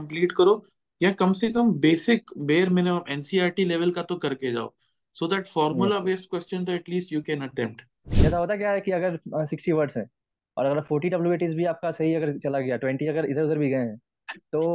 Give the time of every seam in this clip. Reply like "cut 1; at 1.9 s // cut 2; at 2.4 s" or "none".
cut 1; at 8.1 s